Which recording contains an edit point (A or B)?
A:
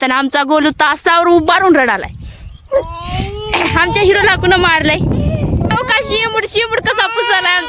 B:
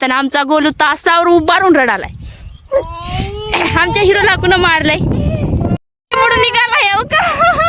A